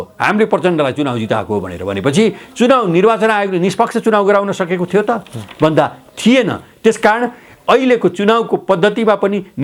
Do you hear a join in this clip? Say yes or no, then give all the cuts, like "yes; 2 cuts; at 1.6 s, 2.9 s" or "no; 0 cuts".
no; 0 cuts